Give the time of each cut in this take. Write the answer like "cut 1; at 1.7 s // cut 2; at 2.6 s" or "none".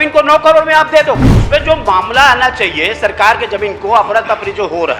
cut 1; at 1.4 s